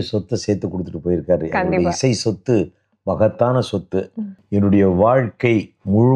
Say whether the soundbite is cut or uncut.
cut